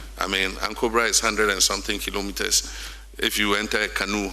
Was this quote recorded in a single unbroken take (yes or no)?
yes